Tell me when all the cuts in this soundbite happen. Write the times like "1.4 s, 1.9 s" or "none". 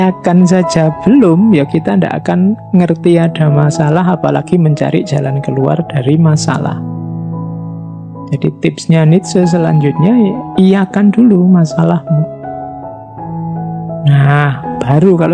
none